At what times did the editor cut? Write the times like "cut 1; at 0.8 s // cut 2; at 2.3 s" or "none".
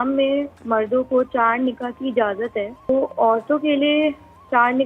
cut 1; at 2.9 s